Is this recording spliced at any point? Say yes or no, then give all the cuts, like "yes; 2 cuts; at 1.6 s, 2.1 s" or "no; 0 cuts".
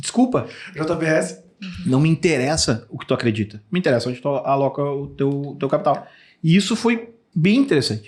no; 0 cuts